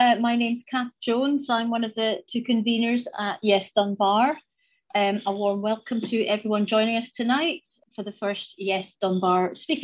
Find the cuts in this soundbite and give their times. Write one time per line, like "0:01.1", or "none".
0:07.8